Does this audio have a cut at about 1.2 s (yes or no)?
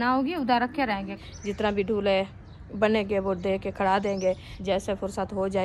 yes